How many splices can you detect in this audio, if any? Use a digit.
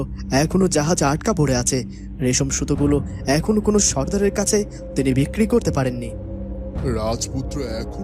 0